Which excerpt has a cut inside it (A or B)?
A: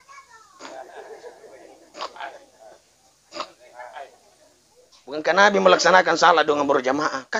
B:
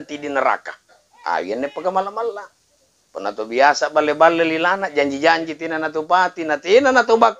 A